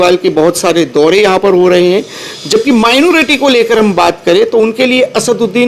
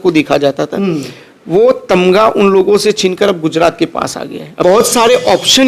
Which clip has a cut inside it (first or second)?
second